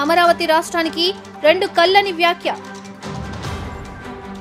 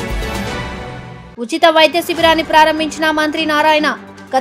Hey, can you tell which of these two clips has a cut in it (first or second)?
second